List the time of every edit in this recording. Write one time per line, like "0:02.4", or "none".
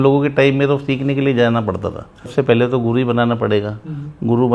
0:02.3